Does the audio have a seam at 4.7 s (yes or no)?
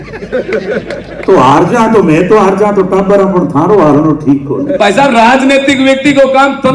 yes